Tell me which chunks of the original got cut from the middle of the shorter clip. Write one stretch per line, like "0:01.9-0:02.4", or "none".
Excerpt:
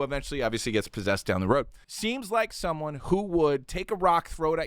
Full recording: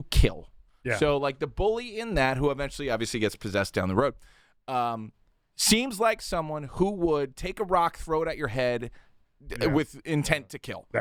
0:04.5-0:05.7